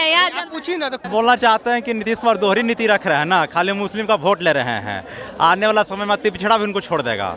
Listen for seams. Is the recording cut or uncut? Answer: cut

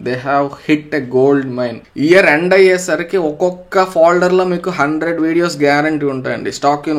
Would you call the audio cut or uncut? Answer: cut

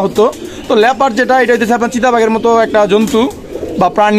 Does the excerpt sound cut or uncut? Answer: uncut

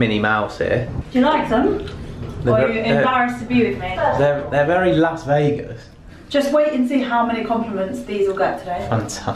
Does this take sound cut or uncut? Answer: cut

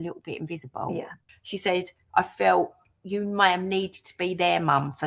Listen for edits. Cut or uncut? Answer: cut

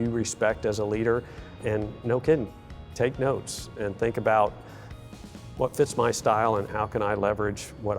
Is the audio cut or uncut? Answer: cut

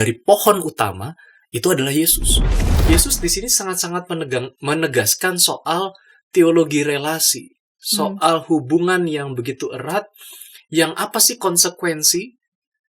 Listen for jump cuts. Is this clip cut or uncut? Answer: cut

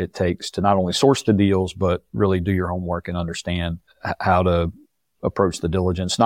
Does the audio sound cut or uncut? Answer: cut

